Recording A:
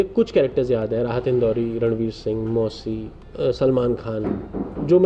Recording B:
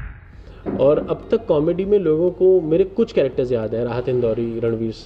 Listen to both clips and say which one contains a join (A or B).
A